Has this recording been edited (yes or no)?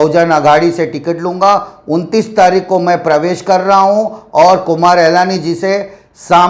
no